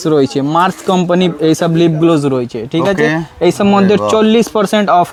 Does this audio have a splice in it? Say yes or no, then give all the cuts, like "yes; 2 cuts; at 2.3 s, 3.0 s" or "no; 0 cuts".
no; 0 cuts